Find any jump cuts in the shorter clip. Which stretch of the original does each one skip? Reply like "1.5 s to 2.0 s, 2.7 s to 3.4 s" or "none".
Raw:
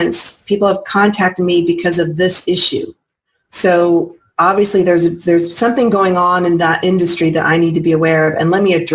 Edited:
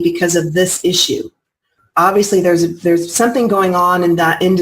3.4 s to 4.2 s